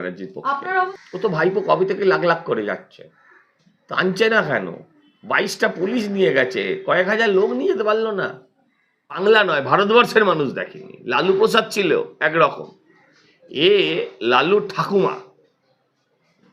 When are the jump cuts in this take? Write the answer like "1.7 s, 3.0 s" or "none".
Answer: 0.9 s, 9.2 s